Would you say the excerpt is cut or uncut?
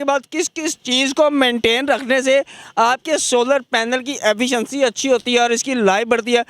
uncut